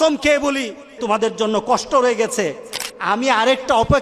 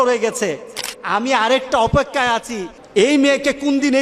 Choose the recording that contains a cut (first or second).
first